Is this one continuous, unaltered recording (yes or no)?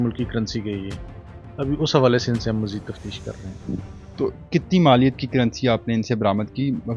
yes